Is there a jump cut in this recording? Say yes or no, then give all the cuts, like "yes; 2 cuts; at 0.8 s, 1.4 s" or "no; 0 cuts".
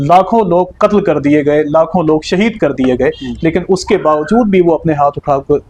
no; 0 cuts